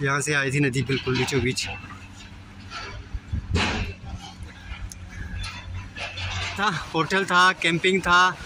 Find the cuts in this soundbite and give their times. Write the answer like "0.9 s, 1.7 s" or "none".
6.6 s